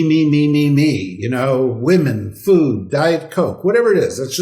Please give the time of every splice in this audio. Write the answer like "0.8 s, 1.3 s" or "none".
none